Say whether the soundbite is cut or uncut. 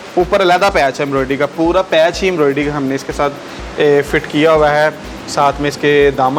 uncut